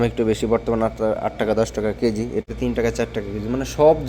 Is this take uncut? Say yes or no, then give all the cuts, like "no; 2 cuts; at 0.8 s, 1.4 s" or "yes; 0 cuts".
no; 1 cut; at 2.4 s